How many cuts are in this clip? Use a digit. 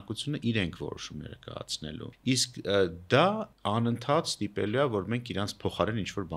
2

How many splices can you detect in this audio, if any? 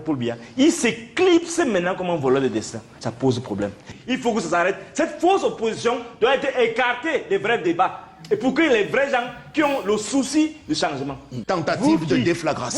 2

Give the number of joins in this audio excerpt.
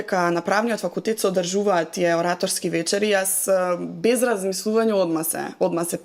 0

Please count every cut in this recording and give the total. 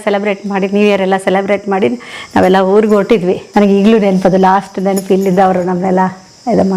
1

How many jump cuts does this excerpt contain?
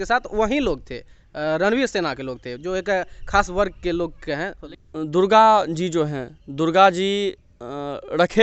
1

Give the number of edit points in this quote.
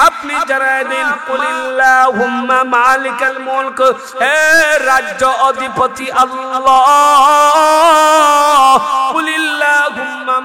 1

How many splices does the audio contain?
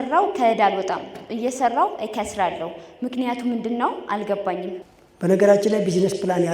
1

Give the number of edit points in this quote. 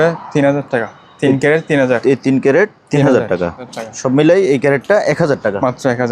1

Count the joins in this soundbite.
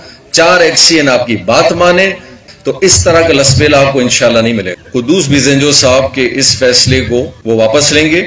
3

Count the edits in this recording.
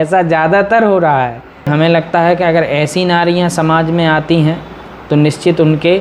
1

